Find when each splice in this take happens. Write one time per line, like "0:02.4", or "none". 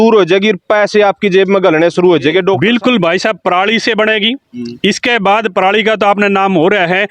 0:02.6